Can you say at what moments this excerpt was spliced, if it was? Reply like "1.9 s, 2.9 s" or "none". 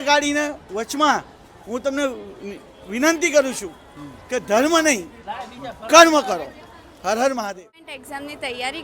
7.9 s